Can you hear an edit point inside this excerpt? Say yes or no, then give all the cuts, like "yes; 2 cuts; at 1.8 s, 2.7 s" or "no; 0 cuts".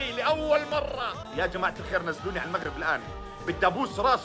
yes; 1 cut; at 1.2 s